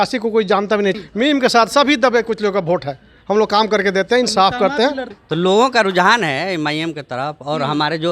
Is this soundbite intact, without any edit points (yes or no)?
no